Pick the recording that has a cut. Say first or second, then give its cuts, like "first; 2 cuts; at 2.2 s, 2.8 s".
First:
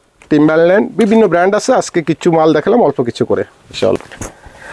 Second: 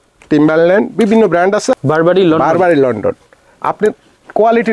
second; 1 cut; at 1.7 s